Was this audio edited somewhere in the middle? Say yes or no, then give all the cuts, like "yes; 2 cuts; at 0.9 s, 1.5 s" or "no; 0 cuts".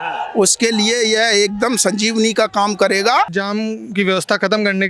yes; 1 cut; at 3.3 s